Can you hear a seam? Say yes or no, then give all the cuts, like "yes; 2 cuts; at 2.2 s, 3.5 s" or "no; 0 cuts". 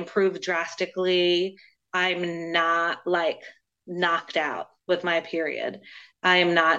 no; 0 cuts